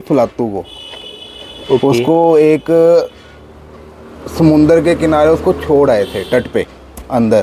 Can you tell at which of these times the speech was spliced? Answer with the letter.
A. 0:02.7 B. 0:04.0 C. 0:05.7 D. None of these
D